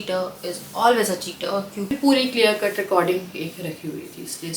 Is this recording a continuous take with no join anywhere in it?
no; 1 cut; at 1.9 s

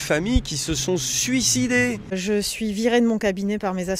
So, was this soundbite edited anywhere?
yes; 1 cut; at 2.1 s

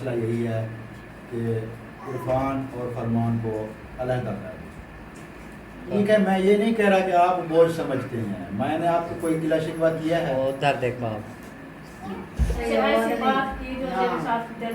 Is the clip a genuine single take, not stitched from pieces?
no; 2 cuts; at 5.9 s, 12.7 s

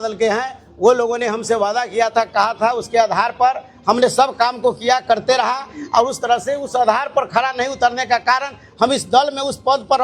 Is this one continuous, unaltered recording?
yes; 0 cuts

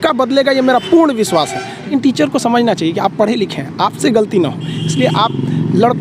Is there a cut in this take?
yes; 1 cut; at 1.8 s

